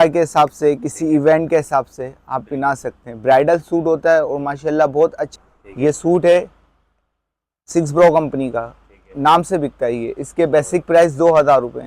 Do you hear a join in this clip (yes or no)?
yes